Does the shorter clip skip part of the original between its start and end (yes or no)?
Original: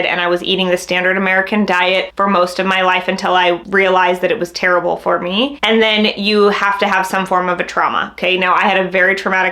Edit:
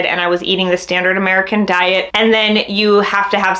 yes